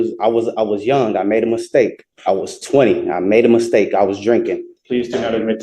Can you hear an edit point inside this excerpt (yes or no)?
yes